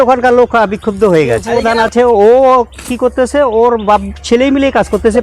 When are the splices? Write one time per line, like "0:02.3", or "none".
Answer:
0:01.5